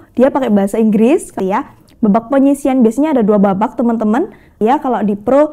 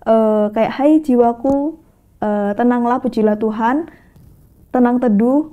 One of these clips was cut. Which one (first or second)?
first